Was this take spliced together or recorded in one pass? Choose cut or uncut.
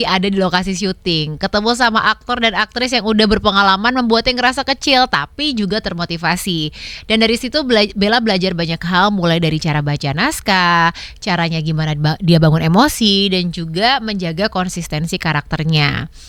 uncut